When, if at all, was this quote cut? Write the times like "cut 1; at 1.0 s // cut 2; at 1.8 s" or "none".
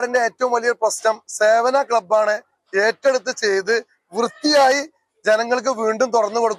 none